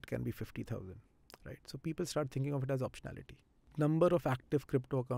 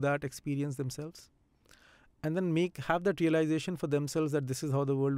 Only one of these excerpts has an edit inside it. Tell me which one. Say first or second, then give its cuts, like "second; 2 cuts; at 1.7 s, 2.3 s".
first; 1 cut; at 3.6 s